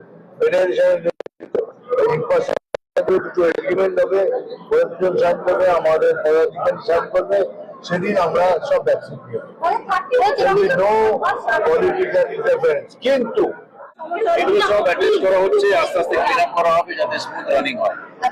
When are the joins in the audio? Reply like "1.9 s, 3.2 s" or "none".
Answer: 14.0 s